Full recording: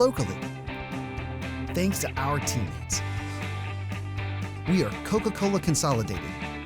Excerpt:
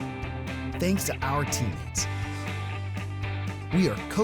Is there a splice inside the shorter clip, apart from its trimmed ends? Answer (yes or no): no